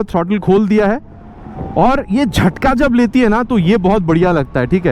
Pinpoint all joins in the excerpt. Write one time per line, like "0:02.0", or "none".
none